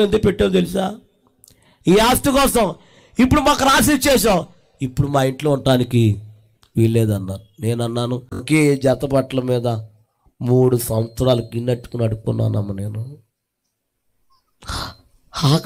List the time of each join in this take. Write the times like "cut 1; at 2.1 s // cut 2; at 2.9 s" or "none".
cut 1; at 8.4 s

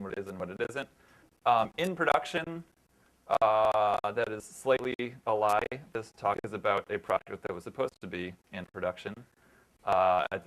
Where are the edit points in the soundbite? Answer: none

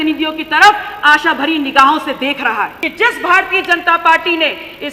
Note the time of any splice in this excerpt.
cut 1; at 2.8 s

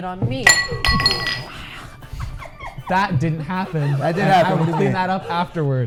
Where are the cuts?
none

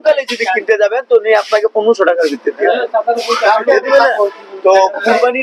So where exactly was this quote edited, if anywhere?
none

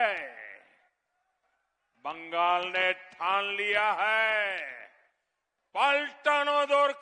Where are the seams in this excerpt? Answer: none

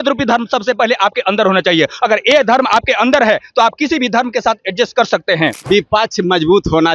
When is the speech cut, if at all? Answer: cut 1; at 5.6 s

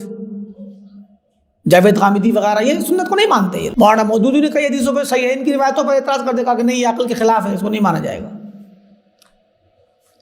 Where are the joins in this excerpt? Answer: cut 1; at 3.7 s

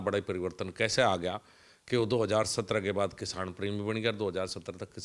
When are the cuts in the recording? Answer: none

